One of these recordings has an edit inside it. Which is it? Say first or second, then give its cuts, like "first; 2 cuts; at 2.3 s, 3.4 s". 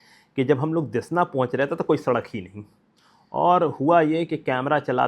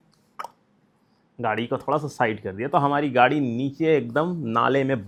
first; 1 cut; at 3.0 s